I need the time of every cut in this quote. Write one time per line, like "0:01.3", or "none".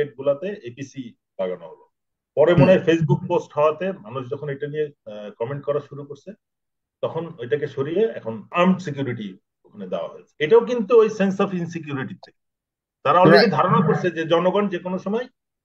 0:08.5
0:10.2